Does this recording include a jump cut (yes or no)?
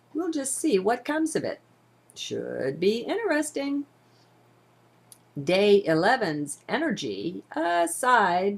no